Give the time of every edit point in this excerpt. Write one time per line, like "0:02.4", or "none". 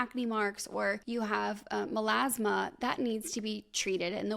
0:01.0